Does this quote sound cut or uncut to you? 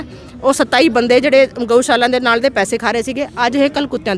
uncut